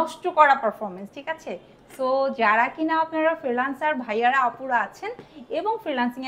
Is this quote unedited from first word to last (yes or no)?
yes